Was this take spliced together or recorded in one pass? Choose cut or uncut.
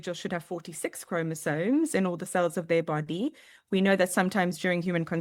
uncut